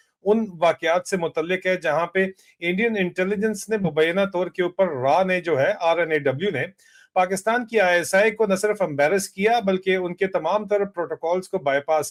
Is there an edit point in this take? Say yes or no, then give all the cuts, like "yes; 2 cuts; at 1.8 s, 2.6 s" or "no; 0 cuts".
no; 0 cuts